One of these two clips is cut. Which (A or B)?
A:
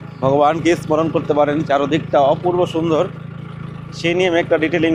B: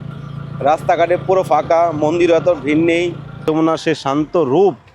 B